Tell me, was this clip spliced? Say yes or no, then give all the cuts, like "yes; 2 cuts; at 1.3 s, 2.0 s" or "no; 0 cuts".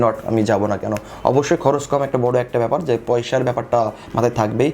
no; 0 cuts